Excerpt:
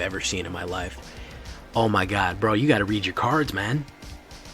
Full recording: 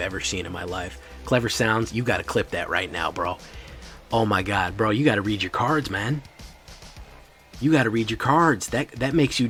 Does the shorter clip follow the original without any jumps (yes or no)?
no